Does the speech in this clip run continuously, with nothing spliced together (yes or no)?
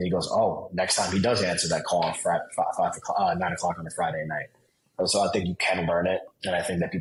yes